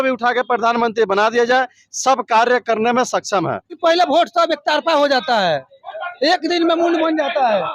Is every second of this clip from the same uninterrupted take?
no; 1 cut; at 3.8 s

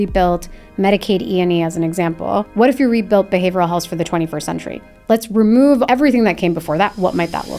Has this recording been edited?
yes; 2 cuts; at 2.5 s, 5.8 s

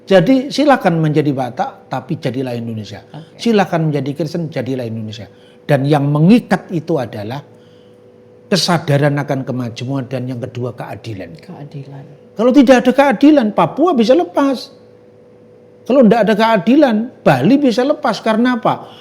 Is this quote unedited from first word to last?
yes; 0 cuts

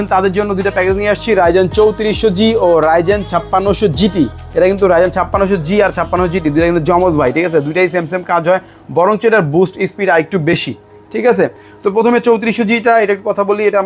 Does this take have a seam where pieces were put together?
no; 0 cuts

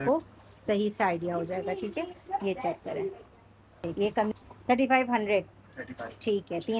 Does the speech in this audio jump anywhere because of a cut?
yes; 1 cut; at 4.3 s

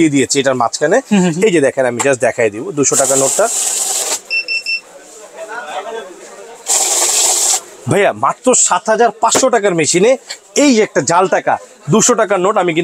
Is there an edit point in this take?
no; 0 cuts

